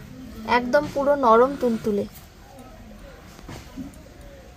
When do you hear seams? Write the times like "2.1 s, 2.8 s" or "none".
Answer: 2.5 s